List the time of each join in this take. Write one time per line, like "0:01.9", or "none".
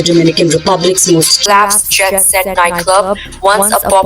0:01.4